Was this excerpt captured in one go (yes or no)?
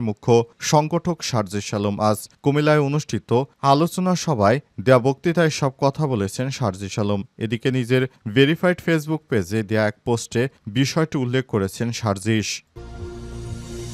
no